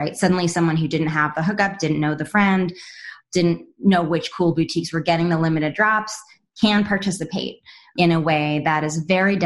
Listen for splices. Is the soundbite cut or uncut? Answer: uncut